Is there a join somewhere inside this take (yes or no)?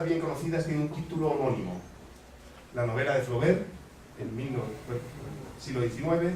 yes